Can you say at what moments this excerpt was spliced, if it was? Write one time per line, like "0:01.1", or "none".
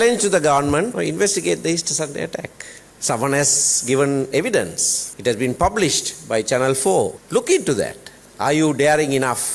0:00.9